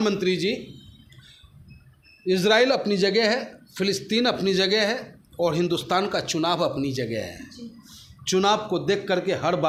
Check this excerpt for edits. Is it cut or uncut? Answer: uncut